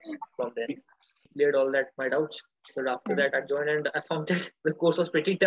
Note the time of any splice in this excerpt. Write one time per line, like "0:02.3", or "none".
0:01.2